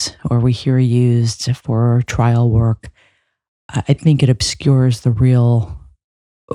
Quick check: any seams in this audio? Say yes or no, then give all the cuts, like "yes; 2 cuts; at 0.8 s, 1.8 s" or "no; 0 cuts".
no; 0 cuts